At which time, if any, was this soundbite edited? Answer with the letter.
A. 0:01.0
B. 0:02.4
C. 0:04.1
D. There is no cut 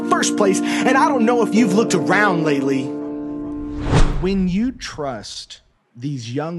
C